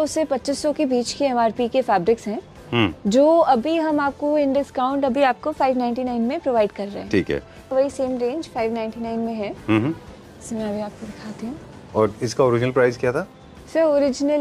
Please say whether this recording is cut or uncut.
cut